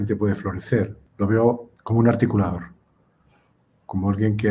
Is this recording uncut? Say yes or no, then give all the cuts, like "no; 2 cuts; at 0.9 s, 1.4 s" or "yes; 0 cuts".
no; 2 cuts; at 1.0 s, 1.7 s